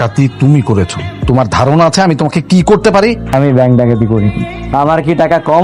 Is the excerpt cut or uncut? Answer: uncut